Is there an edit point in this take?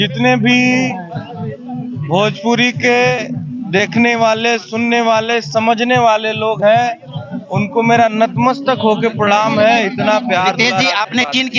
no; 0 cuts

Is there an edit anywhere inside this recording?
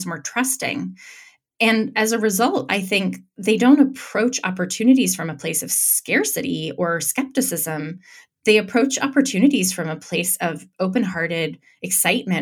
no; 0 cuts

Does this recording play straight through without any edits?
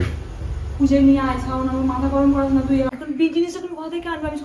no; 1 cut; at 2.9 s

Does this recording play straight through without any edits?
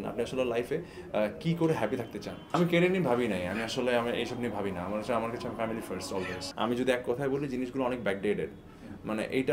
no; 2 cuts; at 2.4 s, 6.4 s

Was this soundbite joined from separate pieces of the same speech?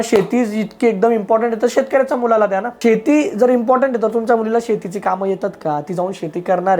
yes; 1 cut; at 2.7 s

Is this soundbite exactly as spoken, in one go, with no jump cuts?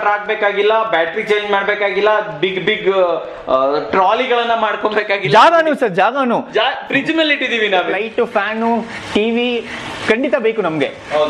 no; 1 cut; at 7.8 s

